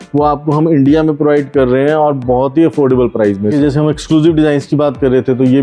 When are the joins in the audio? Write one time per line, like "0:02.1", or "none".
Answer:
0:03.5